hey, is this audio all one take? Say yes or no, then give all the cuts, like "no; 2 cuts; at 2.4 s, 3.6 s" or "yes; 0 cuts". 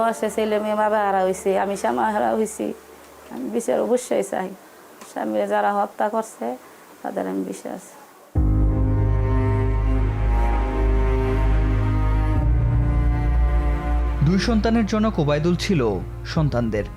yes; 0 cuts